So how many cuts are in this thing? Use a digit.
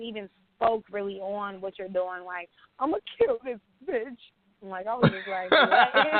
0